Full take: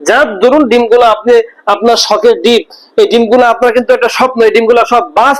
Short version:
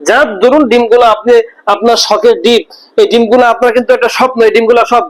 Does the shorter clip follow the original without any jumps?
yes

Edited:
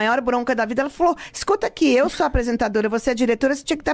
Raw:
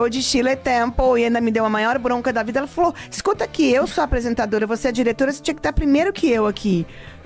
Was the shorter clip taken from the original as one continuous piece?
yes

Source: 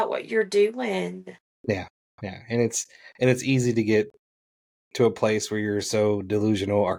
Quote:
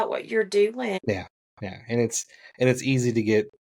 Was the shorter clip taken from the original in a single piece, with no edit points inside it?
no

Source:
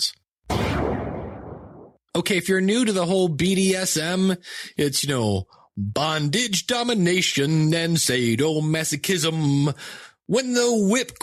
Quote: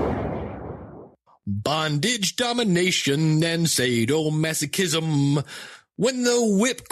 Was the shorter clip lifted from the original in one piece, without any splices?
no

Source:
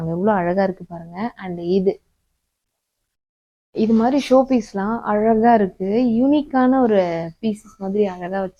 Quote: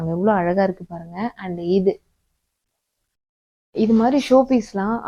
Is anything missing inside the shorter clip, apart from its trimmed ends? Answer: no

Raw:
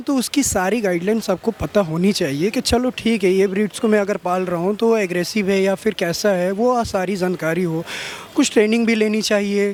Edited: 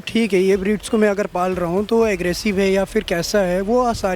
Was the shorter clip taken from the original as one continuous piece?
yes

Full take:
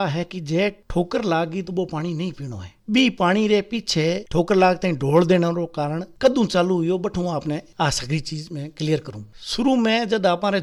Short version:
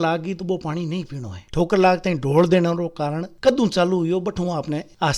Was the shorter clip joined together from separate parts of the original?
yes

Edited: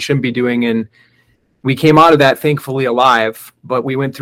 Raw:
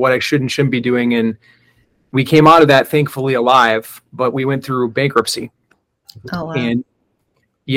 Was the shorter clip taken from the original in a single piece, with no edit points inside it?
yes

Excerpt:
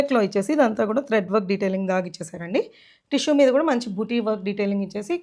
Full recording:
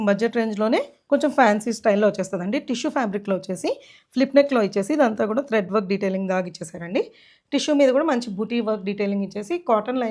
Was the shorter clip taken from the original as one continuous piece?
yes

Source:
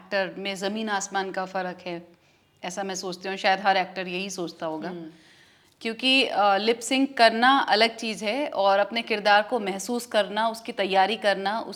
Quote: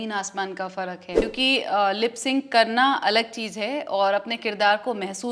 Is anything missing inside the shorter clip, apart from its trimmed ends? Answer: yes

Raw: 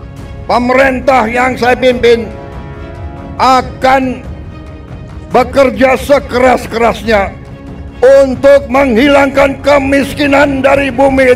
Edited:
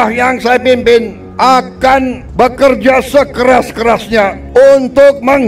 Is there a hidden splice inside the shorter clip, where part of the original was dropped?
yes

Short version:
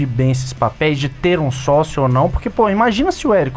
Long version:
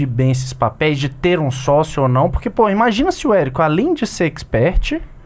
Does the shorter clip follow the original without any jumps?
yes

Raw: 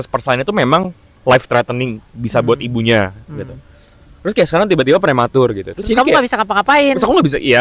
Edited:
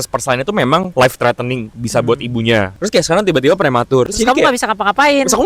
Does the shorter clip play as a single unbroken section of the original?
no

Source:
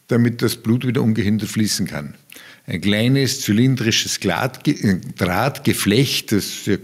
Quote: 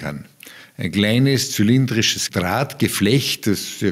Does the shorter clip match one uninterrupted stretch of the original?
no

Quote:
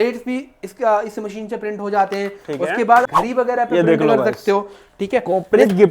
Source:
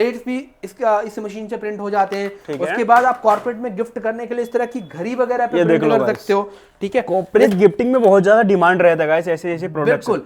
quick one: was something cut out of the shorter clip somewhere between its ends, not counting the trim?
yes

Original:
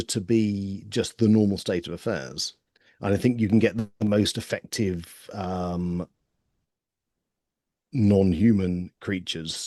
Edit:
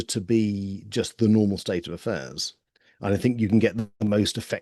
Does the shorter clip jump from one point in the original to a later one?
no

